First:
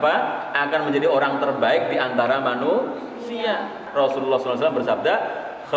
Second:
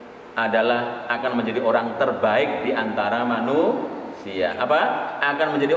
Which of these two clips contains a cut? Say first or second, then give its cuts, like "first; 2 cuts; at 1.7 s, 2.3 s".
first; 1 cut; at 3.8 s